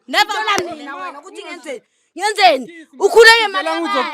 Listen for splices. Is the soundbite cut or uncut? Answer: uncut